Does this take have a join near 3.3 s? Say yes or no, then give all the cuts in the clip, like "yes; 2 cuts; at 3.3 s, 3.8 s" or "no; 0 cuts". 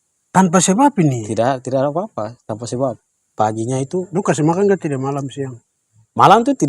yes; 1 cut; at 3.3 s